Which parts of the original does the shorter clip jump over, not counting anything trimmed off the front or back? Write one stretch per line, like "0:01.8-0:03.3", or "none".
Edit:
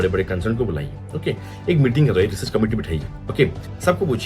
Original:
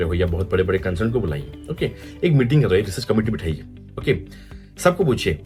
0:03.9-0:04.3